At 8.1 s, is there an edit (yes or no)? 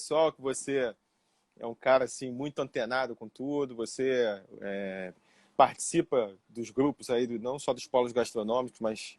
no